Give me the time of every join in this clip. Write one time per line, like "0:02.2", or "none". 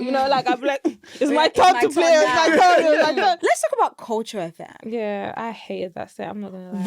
0:03.4
0:04.7